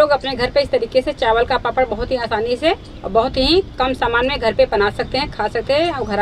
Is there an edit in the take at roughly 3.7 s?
no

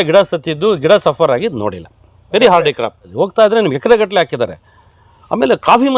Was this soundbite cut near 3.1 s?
yes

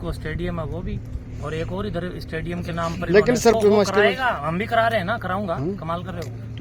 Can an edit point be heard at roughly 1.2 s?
no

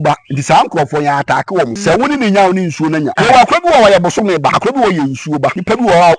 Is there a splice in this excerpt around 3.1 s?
yes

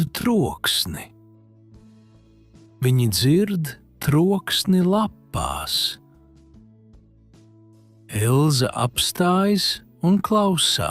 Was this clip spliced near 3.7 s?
no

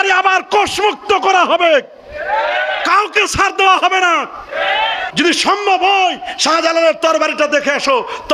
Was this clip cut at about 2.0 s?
no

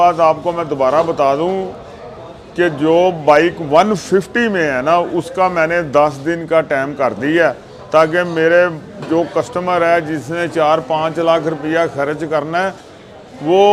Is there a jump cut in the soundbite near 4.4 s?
no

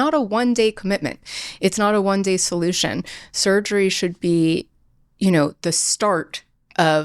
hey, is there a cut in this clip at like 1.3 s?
no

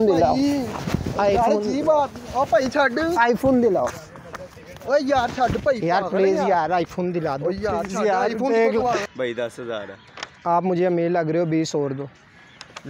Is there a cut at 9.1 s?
yes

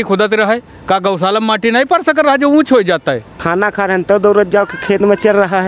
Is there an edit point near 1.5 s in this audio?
no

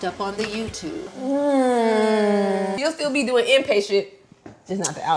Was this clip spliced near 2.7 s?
yes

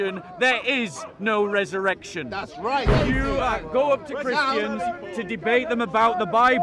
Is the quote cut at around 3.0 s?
yes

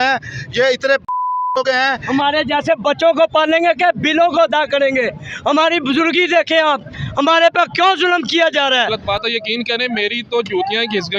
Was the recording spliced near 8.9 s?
yes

